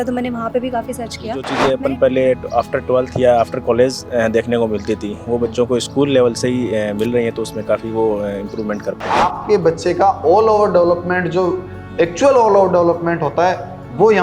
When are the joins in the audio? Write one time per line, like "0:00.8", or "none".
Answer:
0:01.5
0:09.0